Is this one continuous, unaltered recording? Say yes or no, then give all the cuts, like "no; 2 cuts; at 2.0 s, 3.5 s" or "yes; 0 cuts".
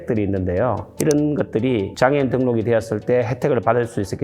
no; 1 cut; at 1.0 s